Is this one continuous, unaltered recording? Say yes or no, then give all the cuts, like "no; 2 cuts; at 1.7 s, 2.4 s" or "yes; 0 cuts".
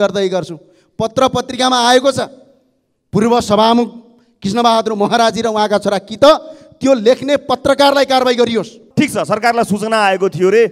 no; 1 cut; at 8.8 s